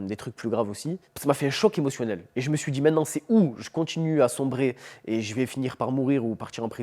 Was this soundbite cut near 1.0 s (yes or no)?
yes